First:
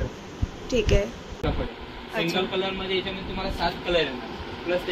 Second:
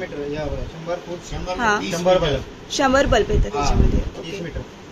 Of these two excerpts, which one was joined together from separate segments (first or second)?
first